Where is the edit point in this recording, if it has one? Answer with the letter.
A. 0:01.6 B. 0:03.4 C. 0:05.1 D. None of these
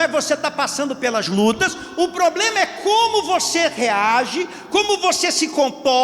A